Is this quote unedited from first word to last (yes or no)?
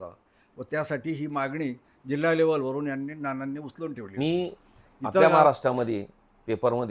no